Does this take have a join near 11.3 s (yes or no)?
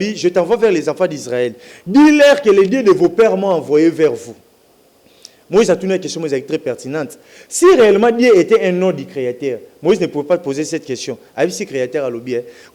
no